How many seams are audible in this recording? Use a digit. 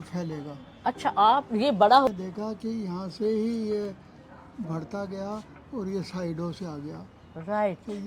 1